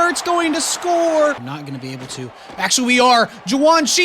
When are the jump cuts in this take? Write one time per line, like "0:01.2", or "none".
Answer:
0:01.5